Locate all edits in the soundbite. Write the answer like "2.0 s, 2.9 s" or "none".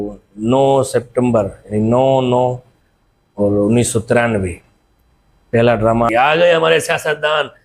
6.1 s